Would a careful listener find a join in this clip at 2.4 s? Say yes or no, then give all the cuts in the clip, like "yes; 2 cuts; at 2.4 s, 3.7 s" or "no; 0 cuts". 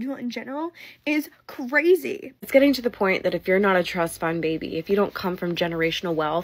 yes; 1 cut; at 2.4 s